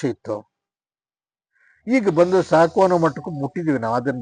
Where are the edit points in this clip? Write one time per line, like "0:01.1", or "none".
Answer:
none